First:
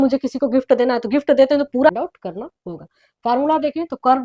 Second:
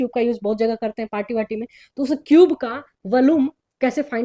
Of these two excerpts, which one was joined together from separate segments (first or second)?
first